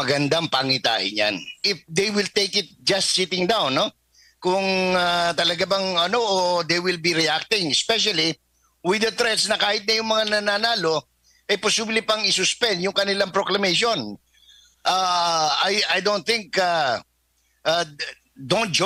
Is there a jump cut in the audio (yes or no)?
yes